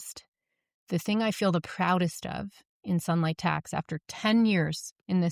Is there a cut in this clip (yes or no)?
no